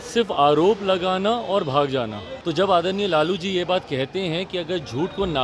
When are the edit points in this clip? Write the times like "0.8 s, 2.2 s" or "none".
2.3 s

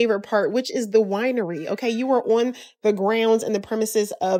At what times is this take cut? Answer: none

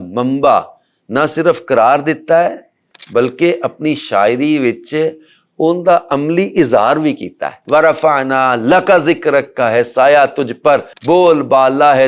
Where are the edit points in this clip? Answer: 7.6 s

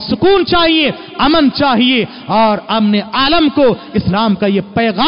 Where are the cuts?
none

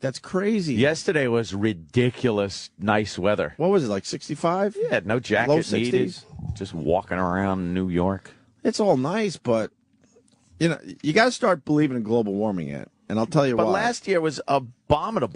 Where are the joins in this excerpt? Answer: none

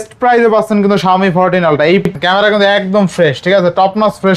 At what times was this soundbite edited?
2.1 s

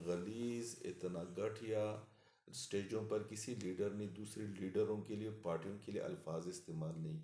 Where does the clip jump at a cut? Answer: none

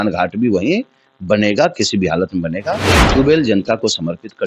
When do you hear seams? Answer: 2.9 s

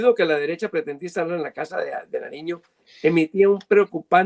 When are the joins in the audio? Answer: none

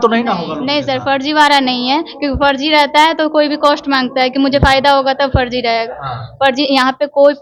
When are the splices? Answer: none

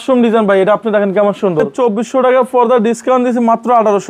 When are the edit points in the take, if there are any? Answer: 1.7 s

